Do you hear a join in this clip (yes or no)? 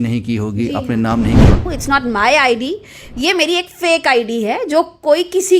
yes